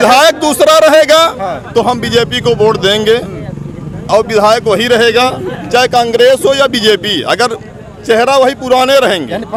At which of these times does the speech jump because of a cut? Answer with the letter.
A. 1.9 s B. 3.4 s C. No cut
C